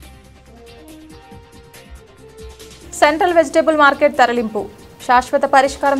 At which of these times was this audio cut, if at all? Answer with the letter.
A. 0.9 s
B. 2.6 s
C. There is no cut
A